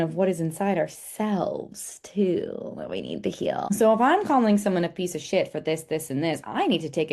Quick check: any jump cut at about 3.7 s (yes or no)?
yes